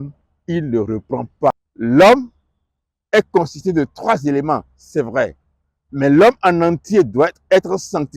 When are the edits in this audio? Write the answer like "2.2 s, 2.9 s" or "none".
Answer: 1.5 s